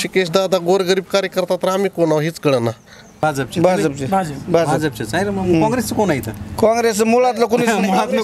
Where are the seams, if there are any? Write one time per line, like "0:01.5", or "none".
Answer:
0:03.2